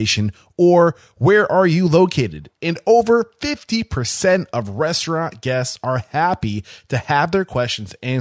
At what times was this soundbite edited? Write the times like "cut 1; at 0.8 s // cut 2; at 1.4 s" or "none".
none